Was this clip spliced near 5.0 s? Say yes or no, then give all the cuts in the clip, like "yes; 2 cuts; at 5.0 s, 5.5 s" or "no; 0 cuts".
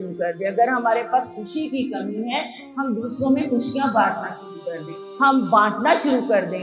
yes; 1 cut; at 5.0 s